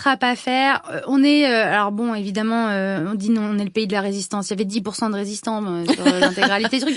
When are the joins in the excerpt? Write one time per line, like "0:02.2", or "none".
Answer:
none